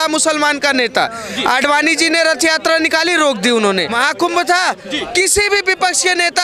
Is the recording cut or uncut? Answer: cut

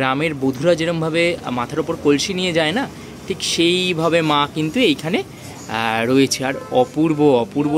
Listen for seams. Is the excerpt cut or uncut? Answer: uncut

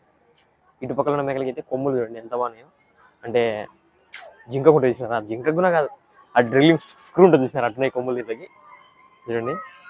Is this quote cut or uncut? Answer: uncut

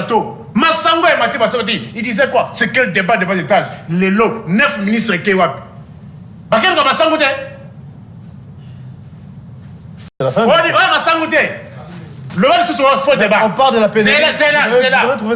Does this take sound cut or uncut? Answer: cut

